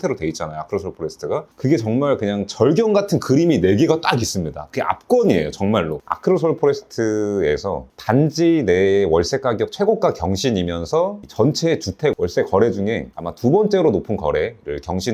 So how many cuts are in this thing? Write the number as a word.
one